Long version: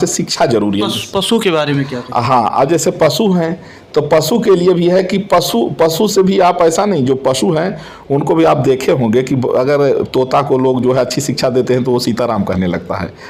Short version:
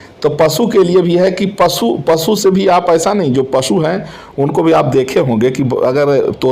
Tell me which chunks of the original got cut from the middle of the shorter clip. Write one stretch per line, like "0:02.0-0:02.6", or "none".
none

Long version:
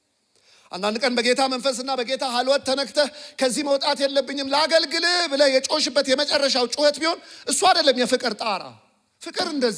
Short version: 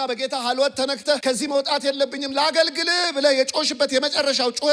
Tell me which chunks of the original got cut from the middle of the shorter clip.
0:03.1-0:03.4

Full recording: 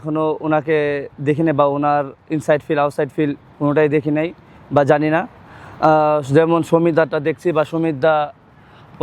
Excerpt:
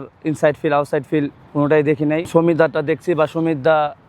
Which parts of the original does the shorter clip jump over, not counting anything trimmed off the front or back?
0:04.3-0:06.7

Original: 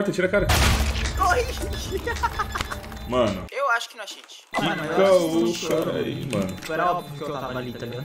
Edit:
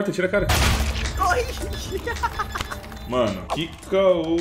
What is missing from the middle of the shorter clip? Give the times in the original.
0:03.4-0:04.5

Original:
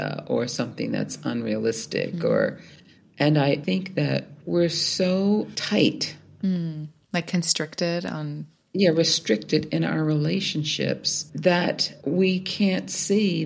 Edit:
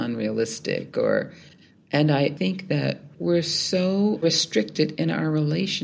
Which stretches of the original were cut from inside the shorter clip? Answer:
0:05.5-0:08.9

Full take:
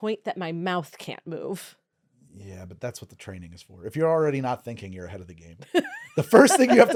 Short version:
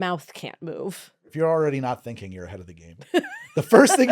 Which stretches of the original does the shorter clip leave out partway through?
0:01.8-0:03.8

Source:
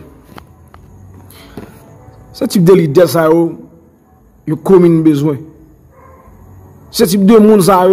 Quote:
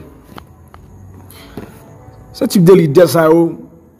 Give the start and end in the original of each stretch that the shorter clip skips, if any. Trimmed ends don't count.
none

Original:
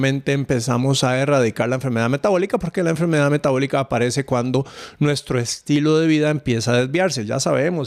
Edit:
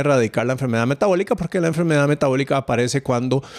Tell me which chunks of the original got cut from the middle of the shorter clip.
none

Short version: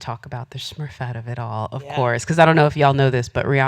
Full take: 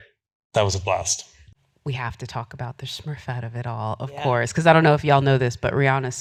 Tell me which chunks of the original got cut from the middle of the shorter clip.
none

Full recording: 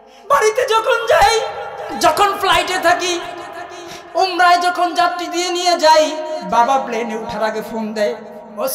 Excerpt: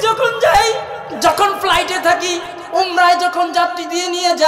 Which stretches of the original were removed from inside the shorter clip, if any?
0:01.7-0:01.8
0:03.3-0:04.0

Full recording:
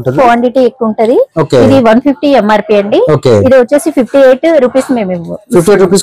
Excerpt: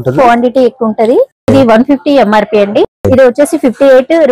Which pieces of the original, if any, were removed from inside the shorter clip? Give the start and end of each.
0:01.5-0:01.7
0:03.1-0:03.3

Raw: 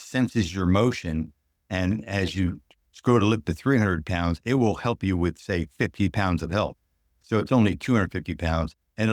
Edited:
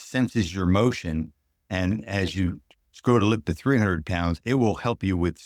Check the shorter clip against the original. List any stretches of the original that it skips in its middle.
none

